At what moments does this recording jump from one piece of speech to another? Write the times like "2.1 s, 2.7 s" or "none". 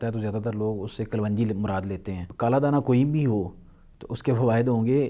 2.2 s